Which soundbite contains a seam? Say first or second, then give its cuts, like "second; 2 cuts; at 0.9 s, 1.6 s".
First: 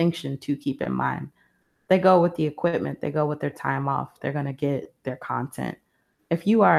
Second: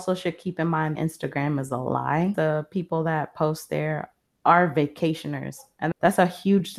second; 2 cuts; at 0.9 s, 5.9 s